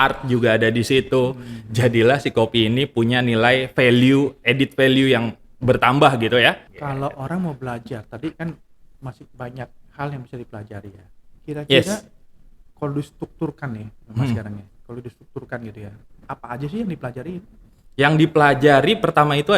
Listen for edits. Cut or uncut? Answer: cut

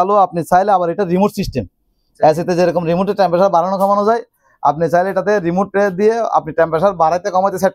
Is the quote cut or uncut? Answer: uncut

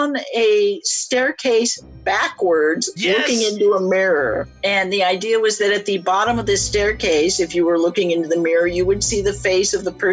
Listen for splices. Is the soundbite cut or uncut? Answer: uncut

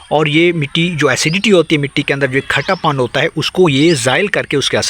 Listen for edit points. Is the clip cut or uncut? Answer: uncut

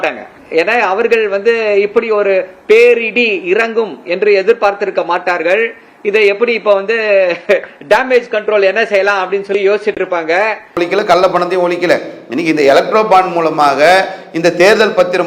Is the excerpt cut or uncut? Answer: cut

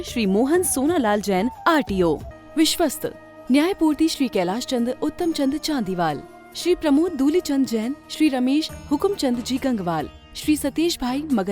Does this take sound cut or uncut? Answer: cut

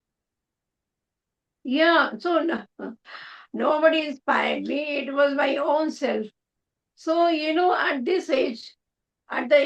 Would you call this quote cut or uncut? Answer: uncut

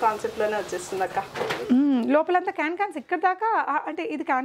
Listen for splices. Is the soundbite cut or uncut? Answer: uncut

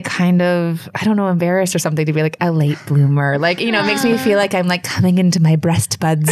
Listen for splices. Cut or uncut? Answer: uncut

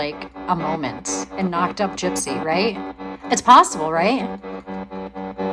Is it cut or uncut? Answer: uncut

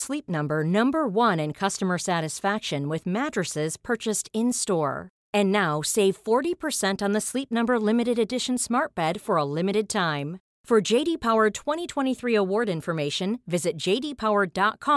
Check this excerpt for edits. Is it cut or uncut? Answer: uncut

